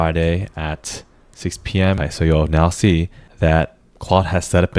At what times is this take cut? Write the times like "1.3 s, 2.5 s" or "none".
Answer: 2.1 s, 3.2 s